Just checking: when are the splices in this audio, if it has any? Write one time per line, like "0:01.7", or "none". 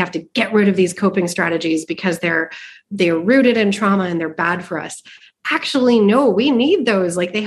none